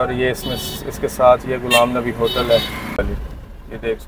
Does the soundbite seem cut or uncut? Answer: cut